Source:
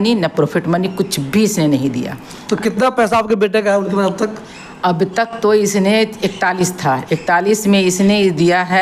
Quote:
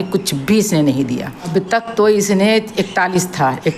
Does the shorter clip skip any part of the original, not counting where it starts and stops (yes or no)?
yes